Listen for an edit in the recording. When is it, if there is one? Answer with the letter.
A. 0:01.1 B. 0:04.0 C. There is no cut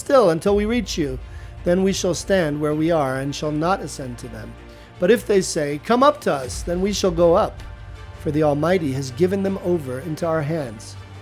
C